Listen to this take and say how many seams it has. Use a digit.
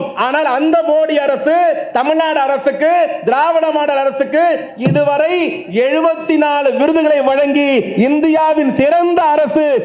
0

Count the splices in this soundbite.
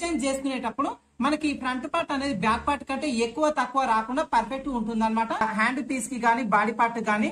1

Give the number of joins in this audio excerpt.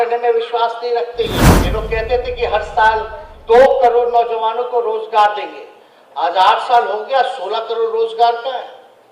1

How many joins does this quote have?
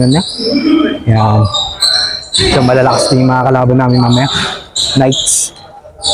0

